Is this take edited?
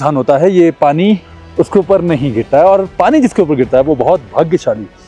no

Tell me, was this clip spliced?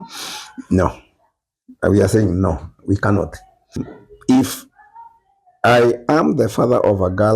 yes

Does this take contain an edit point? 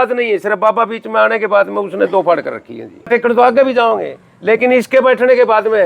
yes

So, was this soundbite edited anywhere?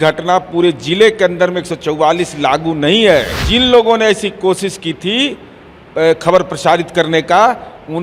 yes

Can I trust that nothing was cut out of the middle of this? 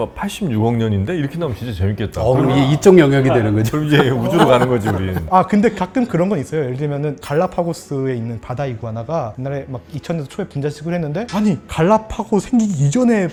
yes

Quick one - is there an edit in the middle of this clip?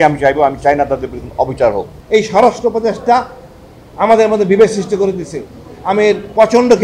yes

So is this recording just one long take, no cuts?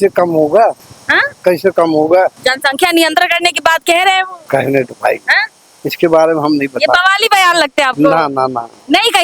yes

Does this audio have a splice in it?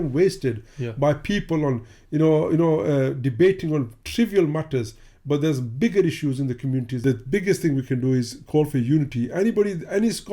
yes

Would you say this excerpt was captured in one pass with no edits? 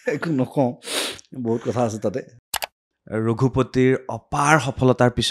no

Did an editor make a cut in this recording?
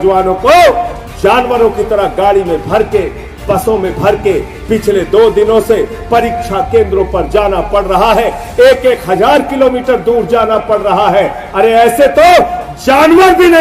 no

